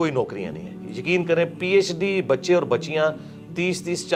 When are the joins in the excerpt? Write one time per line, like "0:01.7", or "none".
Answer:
none